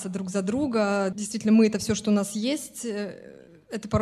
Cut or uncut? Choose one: cut